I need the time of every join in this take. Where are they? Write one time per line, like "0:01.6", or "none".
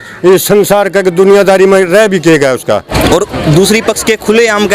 0:02.9